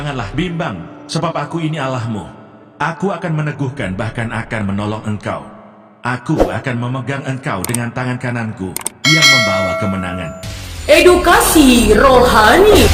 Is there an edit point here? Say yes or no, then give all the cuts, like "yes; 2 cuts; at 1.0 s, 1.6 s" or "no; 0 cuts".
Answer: no; 0 cuts